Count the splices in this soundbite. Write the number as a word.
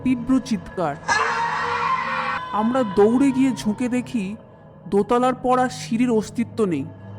one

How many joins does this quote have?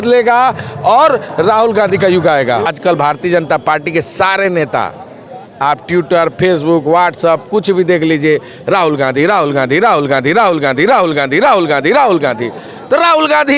one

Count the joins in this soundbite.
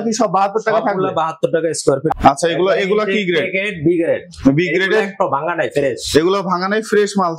one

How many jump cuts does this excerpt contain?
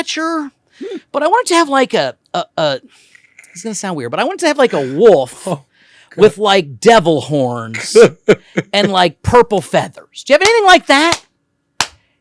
zero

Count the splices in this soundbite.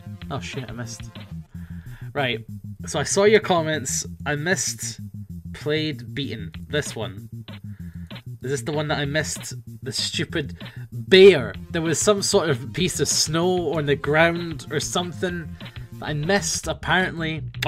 one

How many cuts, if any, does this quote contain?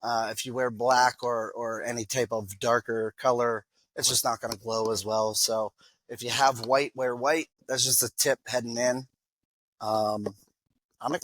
one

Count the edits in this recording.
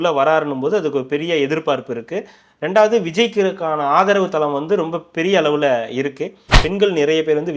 one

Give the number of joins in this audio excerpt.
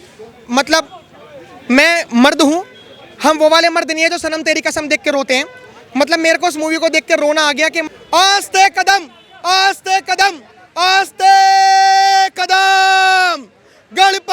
one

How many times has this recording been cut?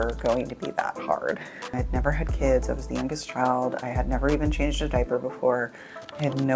one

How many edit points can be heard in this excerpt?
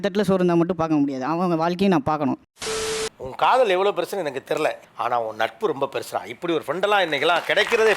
one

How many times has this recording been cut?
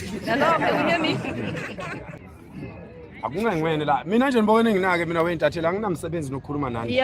one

